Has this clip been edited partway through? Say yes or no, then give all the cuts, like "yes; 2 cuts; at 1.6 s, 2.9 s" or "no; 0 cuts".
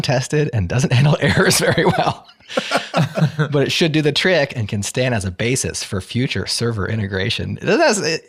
no; 0 cuts